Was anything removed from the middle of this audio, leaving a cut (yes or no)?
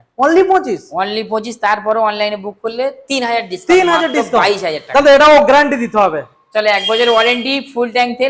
no